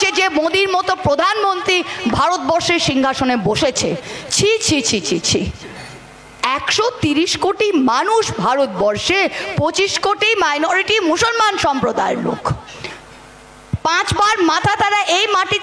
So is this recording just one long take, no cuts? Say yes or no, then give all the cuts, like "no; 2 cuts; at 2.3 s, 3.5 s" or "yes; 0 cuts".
yes; 0 cuts